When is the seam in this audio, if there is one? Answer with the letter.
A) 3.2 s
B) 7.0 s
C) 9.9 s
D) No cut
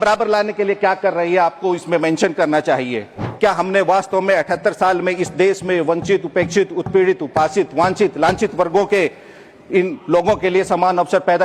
A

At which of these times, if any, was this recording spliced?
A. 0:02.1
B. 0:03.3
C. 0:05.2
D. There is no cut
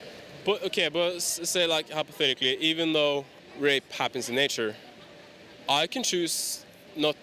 B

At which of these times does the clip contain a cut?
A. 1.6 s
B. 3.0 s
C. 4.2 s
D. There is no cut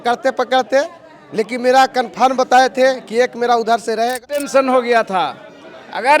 C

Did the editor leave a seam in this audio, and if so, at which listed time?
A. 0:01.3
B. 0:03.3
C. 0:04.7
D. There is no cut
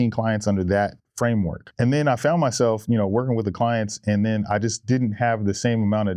A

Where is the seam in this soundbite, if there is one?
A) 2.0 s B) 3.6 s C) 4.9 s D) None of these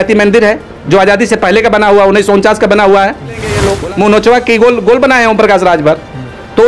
B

